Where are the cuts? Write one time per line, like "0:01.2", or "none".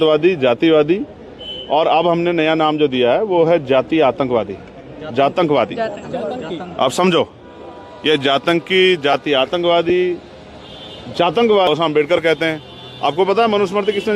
0:11.7

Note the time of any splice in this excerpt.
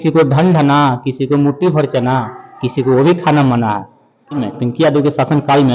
0:04.4

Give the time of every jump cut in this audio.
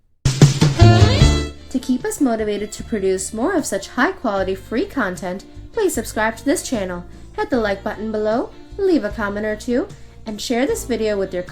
0:01.6

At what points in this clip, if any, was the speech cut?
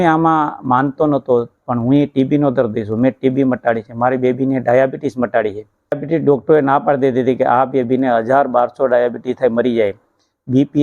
0:06.0

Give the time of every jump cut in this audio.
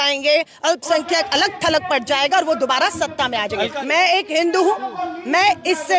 0:03.8

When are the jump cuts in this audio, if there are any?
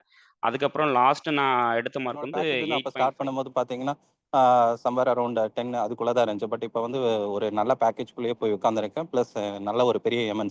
0:02.7

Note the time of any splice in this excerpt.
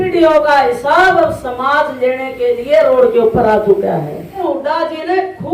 0:04.4

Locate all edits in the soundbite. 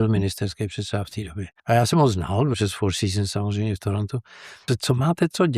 0:01.5
0:02.6
0:04.5

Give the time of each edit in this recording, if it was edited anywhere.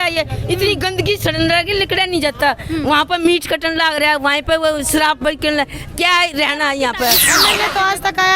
0:07.3

